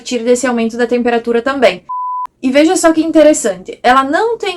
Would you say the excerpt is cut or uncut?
cut